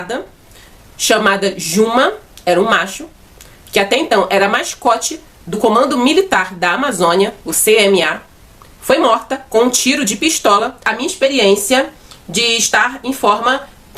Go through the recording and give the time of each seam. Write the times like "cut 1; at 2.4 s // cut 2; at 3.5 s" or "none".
cut 1; at 10.9 s